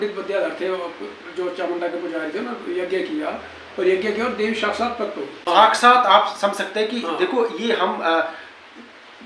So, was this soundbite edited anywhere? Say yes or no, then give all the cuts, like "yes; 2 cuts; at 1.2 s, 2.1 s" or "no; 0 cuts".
yes; 1 cut; at 5.4 s